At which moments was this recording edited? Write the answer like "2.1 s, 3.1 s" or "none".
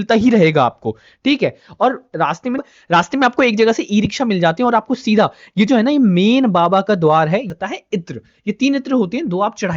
2.6 s, 7.5 s

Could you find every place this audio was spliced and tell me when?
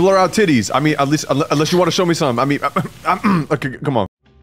none

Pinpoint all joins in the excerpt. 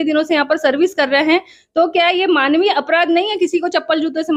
none

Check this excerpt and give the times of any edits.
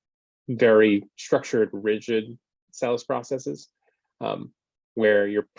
1.1 s

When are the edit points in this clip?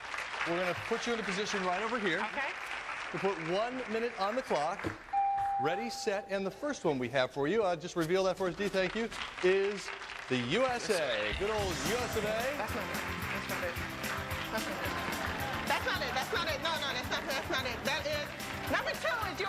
2.3 s

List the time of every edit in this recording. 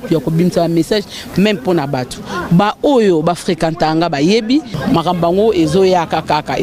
4.7 s

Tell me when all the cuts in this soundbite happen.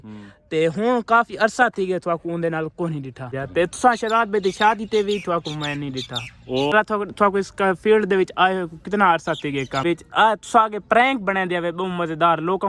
3.3 s, 6.7 s, 9.8 s

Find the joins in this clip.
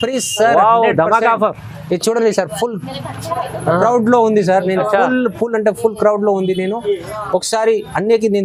none

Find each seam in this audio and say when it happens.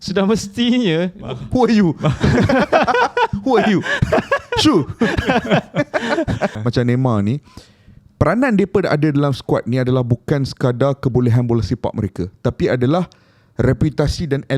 6.6 s

